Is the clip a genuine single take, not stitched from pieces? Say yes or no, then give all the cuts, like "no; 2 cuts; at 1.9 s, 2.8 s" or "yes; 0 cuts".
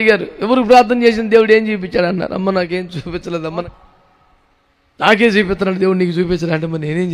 no; 1 cut; at 3.5 s